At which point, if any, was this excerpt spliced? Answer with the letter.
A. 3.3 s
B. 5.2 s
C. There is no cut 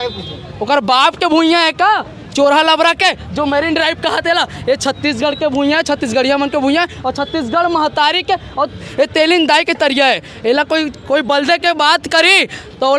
C